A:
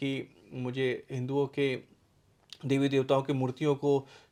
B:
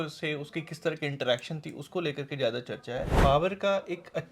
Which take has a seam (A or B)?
B